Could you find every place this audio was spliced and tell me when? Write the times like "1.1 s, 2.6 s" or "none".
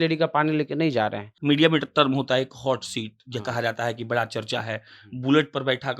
1.3 s